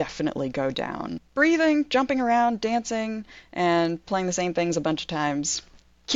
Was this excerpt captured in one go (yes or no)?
no